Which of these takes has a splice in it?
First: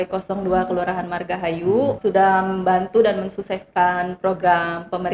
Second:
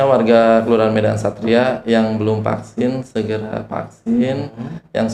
first; 1 cut; at 2.0 s

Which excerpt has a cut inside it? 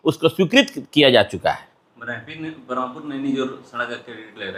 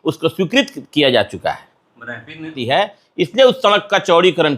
second; 1 cut; at 2.6 s

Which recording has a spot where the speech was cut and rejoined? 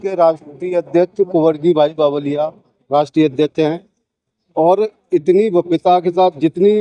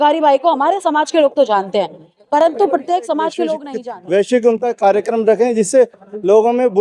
second; 1 cut; at 3.7 s

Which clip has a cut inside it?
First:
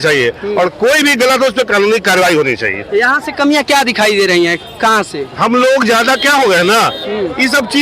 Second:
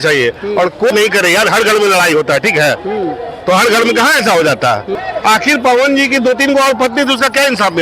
second; 2 cuts; at 0.9 s, 4.9 s

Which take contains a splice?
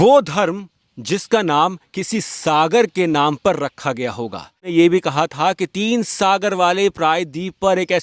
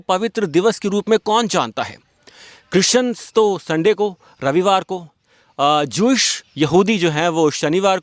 first; 1 cut; at 4.7 s

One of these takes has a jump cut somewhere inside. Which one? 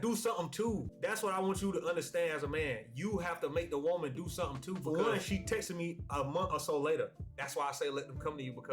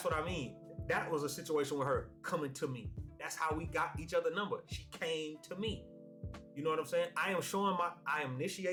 first; 1 cut; at 4.8 s

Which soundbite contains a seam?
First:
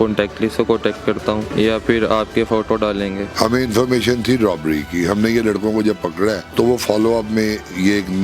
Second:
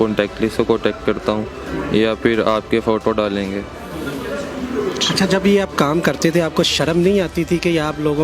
first; 3 cuts; at 1.5 s, 3.3 s, 6.4 s

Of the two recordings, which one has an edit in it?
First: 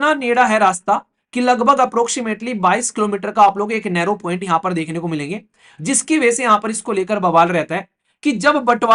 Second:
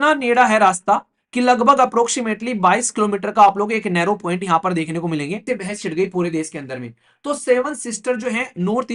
second; 1 cut; at 5.4 s

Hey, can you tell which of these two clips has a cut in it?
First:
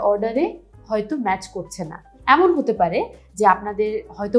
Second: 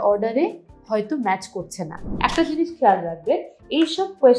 second; 1 cut; at 2.0 s

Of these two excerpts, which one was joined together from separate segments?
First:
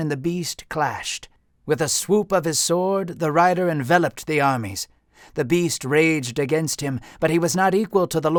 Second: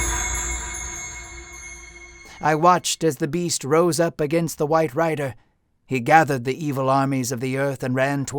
second; 1 cut; at 2.2 s

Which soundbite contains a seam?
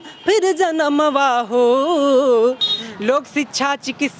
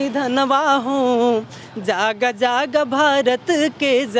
first; 1 cut; at 2.7 s

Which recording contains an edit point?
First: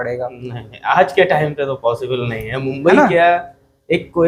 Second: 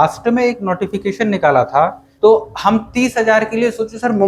second; 1 cut; at 2.0 s

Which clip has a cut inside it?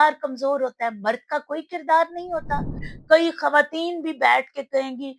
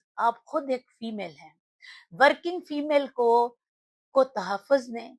first; 1 cut; at 2.9 s

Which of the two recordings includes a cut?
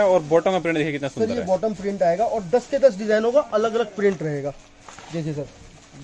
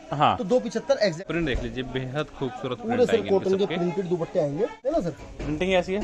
second; 2 cuts; at 1.2 s, 4.8 s

